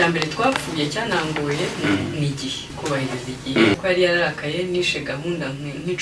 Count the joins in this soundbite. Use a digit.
1